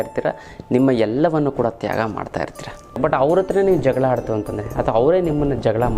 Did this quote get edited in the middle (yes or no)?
yes